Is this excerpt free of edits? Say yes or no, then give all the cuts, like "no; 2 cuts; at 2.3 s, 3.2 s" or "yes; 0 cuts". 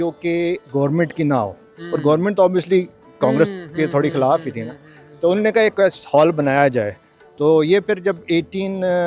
yes; 0 cuts